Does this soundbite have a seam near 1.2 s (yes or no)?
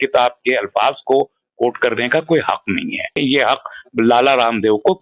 no